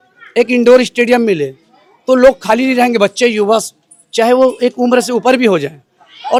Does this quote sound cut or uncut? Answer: uncut